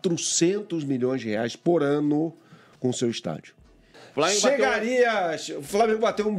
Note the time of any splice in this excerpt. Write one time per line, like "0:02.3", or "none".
0:04.0

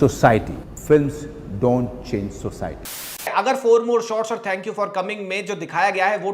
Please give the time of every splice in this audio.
0:03.3

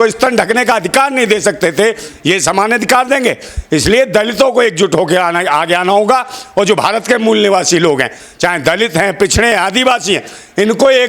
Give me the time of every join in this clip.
none

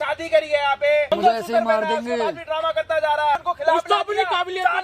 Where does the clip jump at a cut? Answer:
0:01.1
0:03.5

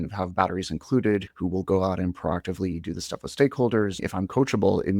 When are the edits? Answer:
0:01.3
0:04.0

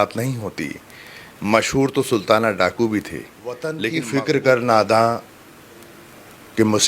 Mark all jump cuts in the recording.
0:03.8

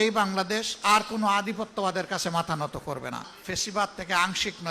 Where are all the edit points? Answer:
0:03.3

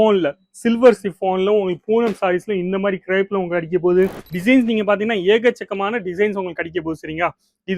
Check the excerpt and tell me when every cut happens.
0:04.3

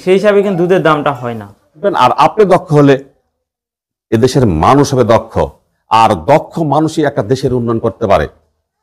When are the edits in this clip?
0:01.8

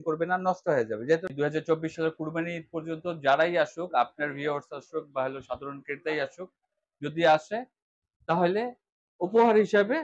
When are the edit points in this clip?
0:01.3

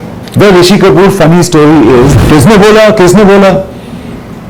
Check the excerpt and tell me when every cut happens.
0:02.1

